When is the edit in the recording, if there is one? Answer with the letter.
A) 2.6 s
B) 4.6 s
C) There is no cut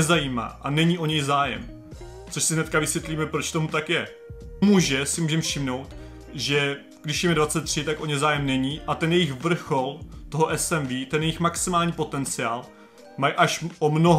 B